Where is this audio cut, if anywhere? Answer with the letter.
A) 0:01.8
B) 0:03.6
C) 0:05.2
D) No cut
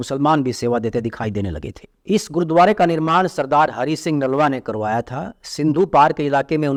D